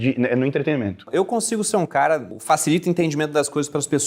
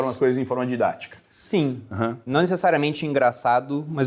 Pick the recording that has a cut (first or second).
first